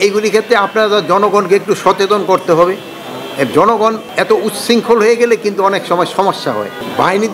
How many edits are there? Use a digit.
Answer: 0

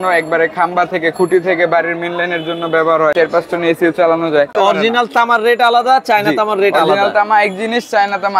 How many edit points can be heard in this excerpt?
2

